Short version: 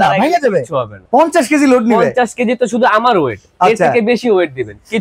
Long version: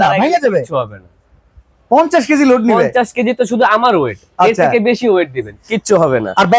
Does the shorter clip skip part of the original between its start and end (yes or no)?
yes